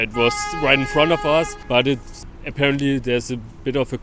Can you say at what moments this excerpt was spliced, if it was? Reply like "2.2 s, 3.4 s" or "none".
none